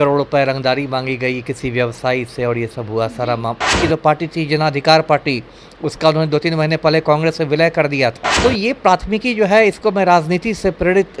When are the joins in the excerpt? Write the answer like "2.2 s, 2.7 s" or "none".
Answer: 3.7 s, 8.3 s

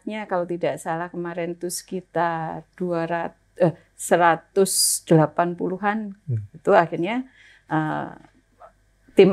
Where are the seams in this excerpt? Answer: none

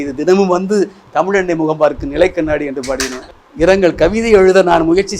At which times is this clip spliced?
3.2 s

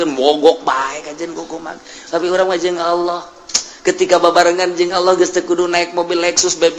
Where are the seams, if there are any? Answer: none

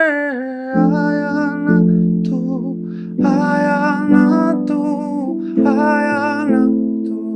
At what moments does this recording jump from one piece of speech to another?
none

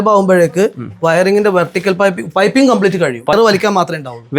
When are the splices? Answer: 3.3 s

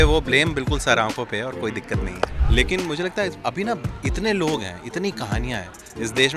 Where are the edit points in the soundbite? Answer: 2.4 s

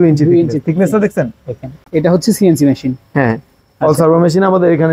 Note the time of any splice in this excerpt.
1.7 s

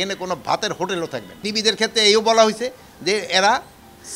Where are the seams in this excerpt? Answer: 1.5 s

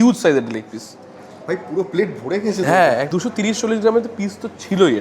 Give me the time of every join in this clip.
3.1 s

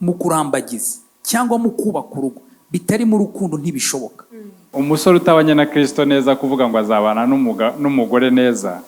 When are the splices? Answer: 4.7 s

